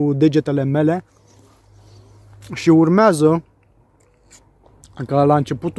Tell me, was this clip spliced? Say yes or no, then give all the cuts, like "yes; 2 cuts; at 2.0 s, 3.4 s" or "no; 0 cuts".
no; 0 cuts